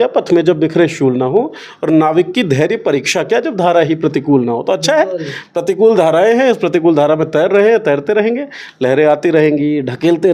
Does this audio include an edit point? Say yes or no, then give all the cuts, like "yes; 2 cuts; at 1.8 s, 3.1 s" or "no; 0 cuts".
no; 0 cuts